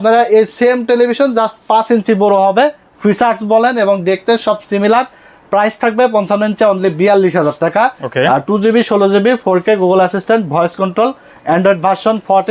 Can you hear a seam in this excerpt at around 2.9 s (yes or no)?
no